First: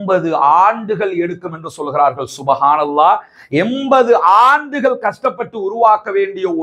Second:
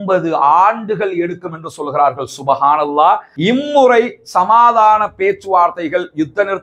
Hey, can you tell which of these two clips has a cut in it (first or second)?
second